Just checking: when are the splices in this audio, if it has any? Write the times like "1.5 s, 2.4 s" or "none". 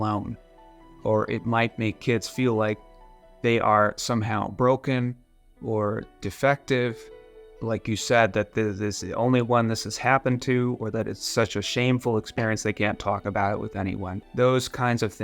14.2 s